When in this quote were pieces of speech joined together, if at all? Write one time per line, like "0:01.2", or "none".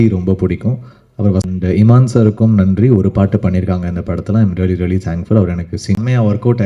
0:01.5
0:06.0